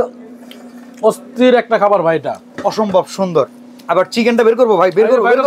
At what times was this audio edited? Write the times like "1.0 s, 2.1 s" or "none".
none